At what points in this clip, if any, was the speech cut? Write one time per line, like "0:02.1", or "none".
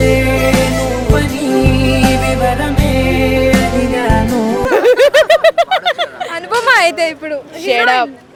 none